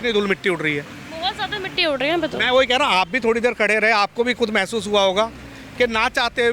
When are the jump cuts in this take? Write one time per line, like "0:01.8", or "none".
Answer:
none